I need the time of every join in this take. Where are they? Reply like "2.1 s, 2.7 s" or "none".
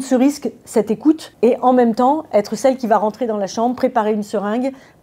1.3 s